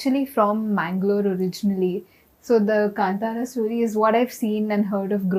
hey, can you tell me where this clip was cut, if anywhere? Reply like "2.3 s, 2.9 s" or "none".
none